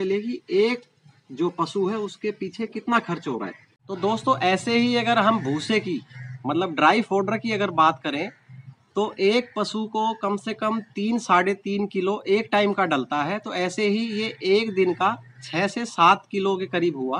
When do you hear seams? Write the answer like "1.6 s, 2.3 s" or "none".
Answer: none